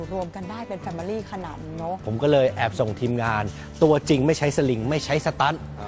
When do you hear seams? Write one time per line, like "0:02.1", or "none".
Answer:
0:02.0